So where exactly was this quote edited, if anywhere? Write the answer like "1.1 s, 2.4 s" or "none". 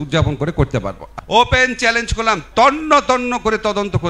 1.0 s